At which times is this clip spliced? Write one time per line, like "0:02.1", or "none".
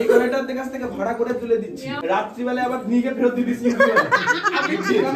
0:02.0

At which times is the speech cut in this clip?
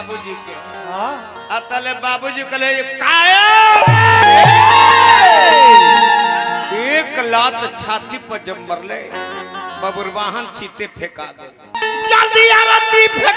0:11.8

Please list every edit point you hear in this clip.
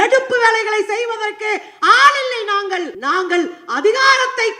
0:02.9

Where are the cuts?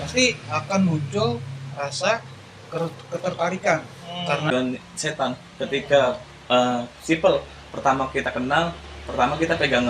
0:04.5

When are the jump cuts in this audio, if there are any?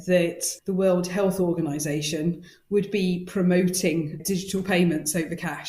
none

